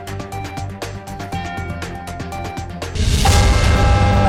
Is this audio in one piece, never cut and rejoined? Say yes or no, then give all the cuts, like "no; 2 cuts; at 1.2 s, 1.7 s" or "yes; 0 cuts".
yes; 0 cuts